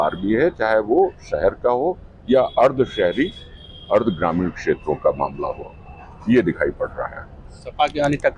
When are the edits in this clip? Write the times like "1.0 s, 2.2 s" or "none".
none